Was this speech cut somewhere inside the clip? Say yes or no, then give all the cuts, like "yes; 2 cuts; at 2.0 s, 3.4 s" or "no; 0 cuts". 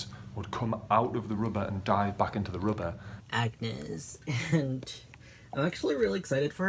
yes; 1 cut; at 3.1 s